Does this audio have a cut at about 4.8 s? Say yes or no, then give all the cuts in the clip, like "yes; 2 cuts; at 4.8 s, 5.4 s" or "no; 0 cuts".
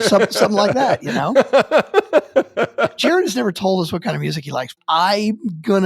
yes; 3 cuts; at 0.9 s, 2.9 s, 4.8 s